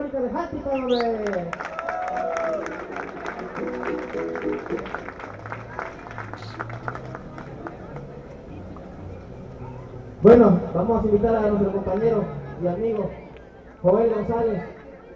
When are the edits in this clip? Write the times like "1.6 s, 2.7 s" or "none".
5.2 s